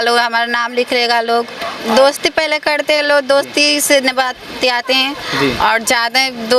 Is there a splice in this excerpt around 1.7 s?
yes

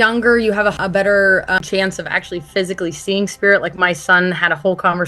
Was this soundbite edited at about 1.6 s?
yes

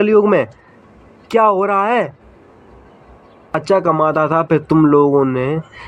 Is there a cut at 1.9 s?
no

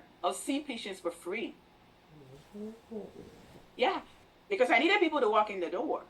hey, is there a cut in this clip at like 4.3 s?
yes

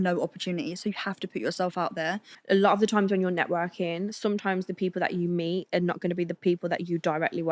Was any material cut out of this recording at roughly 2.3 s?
yes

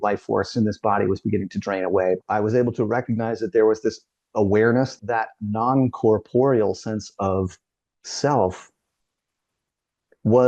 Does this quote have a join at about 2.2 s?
yes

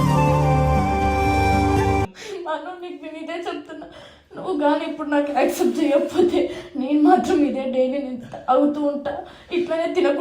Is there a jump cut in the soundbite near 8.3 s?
no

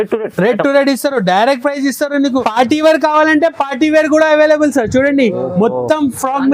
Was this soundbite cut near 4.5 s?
no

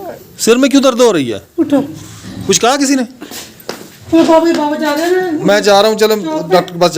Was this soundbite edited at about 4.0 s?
yes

